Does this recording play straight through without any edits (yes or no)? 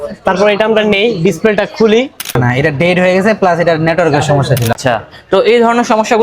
no